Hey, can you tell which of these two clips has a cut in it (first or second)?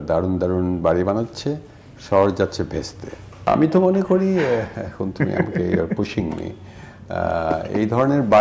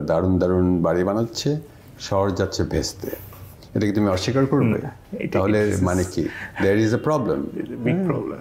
first